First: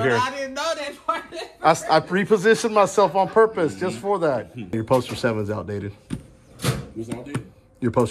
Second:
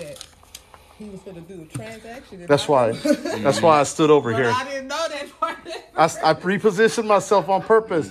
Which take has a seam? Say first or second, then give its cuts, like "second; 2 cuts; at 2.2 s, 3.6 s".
first; 1 cut; at 4.7 s